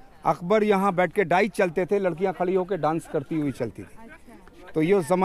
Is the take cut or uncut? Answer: uncut